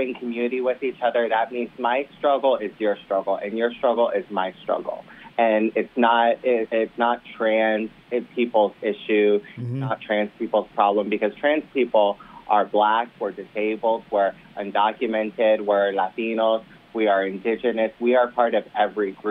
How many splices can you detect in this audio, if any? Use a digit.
0